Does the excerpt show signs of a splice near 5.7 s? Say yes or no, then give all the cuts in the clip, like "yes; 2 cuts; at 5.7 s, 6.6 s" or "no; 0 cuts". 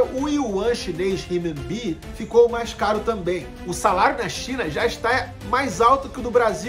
no; 1 cut; at 3.6 s